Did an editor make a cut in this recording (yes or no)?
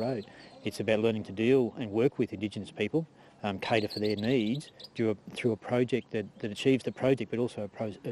no